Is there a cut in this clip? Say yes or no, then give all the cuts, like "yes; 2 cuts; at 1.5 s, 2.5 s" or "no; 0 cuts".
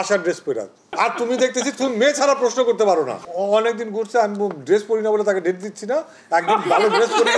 yes; 1 cut; at 3.2 s